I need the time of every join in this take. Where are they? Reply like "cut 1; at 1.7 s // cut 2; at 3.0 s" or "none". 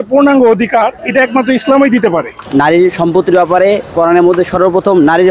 cut 1; at 1.0 s // cut 2; at 2.4 s

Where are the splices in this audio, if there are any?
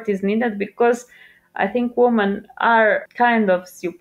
cut 1; at 3.0 s

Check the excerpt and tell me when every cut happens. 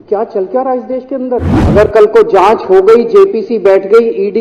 cut 1; at 1.6 s

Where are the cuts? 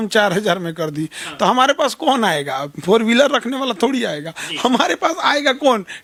none

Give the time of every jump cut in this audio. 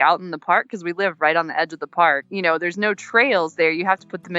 cut 1; at 2.3 s

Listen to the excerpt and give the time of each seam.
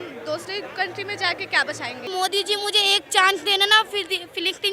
cut 1; at 2.1 s

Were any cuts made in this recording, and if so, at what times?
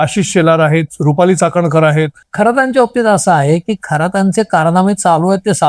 cut 1; at 2.2 s

